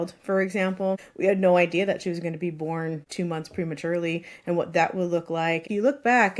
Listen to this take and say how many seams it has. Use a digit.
3